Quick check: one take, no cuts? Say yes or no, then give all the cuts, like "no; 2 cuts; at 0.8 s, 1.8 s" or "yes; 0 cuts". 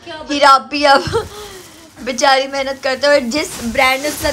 yes; 0 cuts